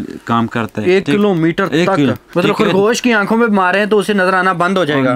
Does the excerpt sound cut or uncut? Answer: cut